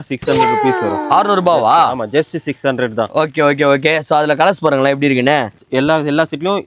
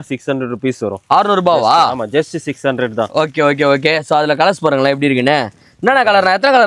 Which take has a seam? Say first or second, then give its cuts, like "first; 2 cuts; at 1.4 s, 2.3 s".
first; 1 cut; at 5.6 s